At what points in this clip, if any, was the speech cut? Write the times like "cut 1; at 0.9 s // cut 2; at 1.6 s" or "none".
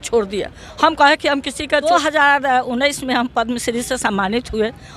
cut 1; at 1.8 s